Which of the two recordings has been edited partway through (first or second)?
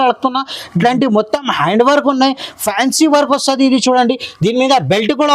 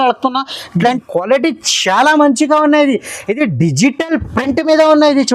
second